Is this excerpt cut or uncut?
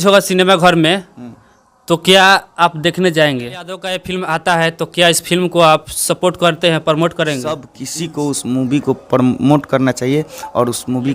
cut